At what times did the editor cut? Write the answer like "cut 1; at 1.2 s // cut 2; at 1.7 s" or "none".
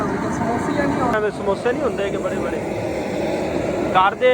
cut 1; at 1.1 s